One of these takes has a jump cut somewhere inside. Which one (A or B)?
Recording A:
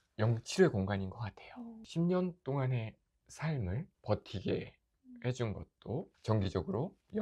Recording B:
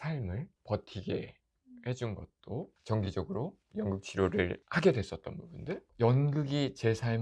B